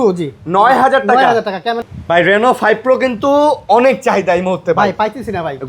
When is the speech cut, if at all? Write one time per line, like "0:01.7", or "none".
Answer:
0:01.8